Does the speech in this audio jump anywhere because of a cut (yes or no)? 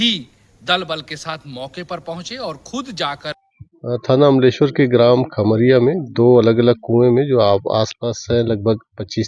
yes